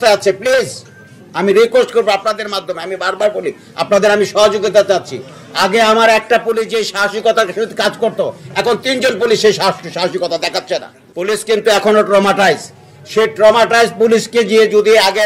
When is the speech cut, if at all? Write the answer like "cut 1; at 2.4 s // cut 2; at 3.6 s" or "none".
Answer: cut 1; at 11.0 s